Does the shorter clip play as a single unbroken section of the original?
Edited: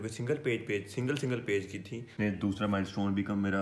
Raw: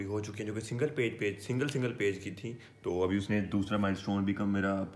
no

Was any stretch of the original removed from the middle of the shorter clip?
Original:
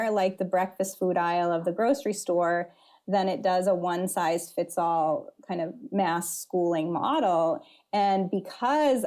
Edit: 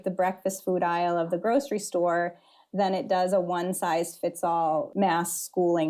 yes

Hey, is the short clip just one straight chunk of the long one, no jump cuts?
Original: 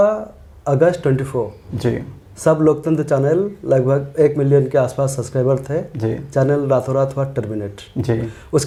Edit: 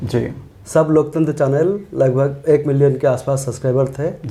yes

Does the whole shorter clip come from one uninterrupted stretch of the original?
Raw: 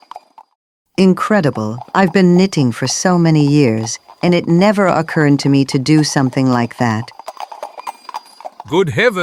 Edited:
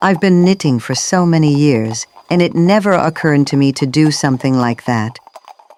yes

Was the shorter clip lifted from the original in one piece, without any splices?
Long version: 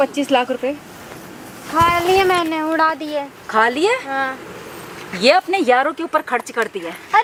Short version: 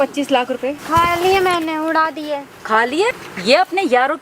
no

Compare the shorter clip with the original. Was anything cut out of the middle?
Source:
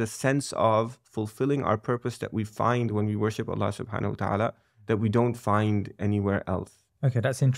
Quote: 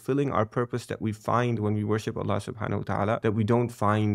yes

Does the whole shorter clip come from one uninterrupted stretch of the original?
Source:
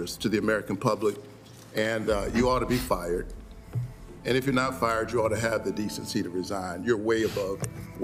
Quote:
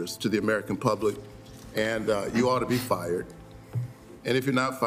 yes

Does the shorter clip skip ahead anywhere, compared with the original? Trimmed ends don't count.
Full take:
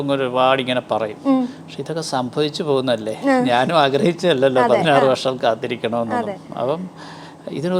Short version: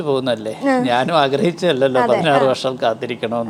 no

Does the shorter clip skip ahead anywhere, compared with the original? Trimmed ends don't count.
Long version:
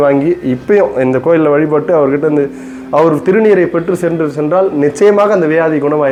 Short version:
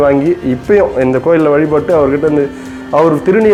no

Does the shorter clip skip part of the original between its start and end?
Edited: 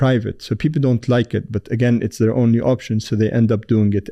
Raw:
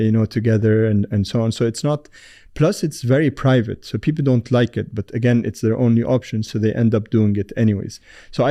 no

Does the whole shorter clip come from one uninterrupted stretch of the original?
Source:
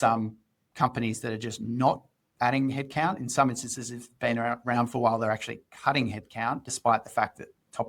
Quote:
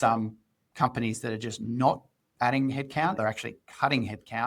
no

